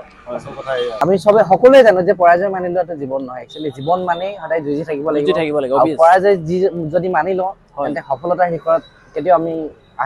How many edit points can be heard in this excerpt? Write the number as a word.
one